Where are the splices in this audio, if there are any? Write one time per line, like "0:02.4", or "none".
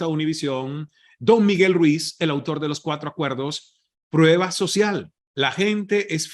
0:05.2